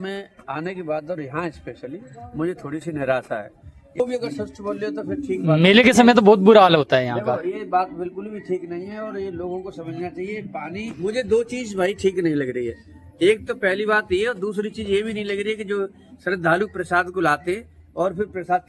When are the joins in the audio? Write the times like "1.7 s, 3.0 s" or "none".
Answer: 3.9 s, 10.9 s